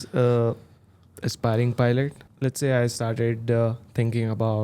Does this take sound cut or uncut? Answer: cut